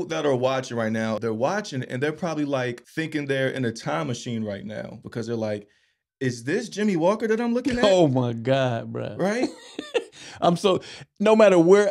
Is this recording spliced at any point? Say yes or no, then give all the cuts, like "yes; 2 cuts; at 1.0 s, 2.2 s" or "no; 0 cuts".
yes; 3 cuts; at 1.2 s, 2.8 s, 5.0 s